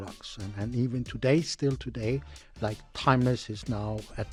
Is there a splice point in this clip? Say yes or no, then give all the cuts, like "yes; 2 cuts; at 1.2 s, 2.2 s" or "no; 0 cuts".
no; 0 cuts